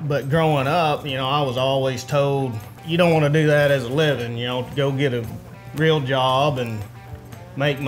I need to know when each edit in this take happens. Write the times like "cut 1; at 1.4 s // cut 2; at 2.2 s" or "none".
cut 1; at 2.8 s